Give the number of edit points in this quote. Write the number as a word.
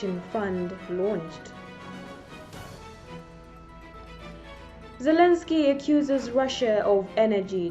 three